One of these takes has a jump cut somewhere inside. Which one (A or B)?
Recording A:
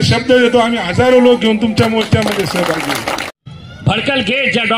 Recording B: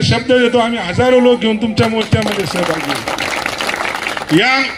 A